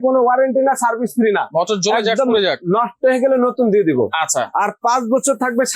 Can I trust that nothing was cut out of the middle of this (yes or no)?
yes